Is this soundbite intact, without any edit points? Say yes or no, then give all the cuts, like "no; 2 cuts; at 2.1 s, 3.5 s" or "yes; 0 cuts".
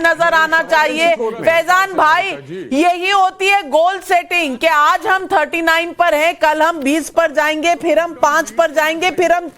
no; 1 cut; at 7.6 s